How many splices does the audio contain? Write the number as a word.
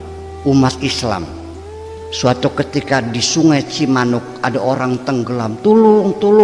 zero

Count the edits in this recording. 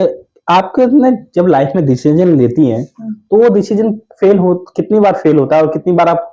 zero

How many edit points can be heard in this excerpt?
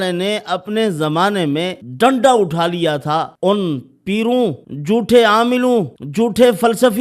four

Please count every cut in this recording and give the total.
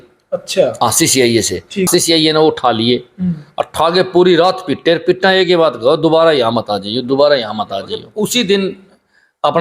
two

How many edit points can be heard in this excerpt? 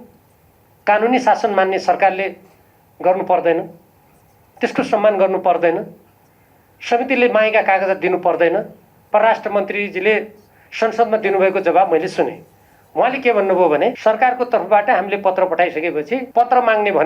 three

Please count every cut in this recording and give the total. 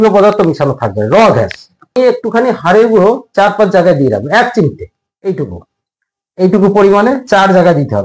one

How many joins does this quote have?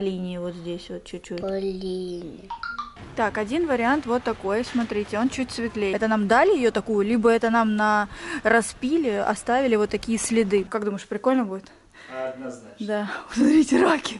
three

